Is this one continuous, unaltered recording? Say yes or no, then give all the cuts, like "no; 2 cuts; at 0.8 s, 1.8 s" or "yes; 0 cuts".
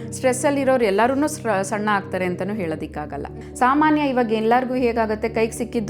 no; 1 cut; at 3.3 s